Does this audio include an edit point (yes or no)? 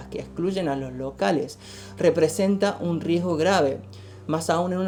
no